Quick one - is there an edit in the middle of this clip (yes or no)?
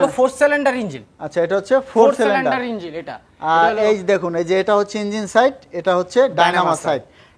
no